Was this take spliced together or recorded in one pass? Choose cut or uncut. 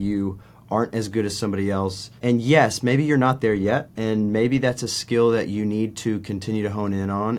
cut